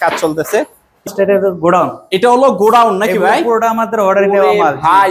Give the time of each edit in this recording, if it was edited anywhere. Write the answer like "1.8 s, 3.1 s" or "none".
1.1 s